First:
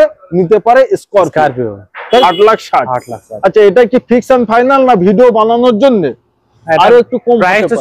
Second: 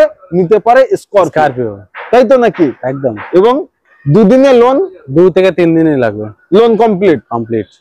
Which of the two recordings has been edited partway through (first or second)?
first